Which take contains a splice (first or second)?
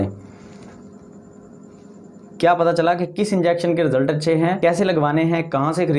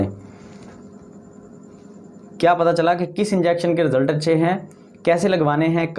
first